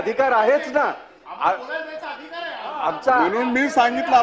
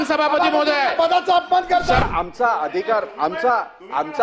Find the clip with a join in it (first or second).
second